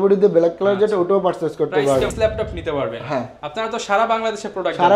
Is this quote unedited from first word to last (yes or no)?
no